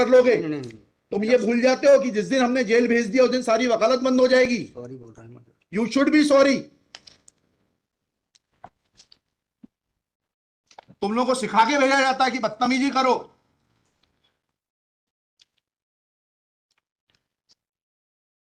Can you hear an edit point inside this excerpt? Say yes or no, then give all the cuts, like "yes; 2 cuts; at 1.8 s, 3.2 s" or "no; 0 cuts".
no; 0 cuts